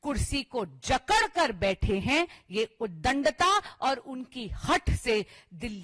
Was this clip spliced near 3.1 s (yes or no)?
no